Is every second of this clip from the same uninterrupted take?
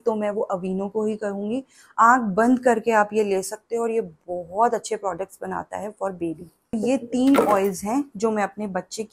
no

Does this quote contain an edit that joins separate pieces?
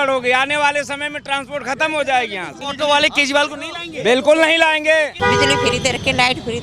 yes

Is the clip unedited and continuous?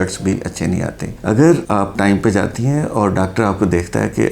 yes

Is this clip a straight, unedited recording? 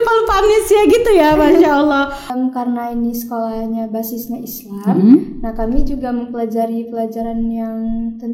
no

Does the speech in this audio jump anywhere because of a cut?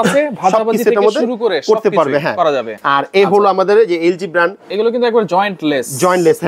yes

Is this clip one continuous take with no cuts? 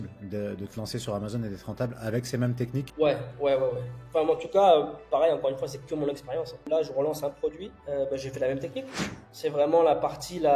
no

